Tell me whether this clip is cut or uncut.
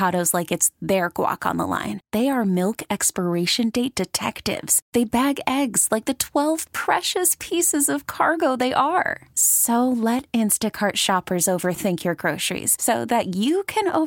uncut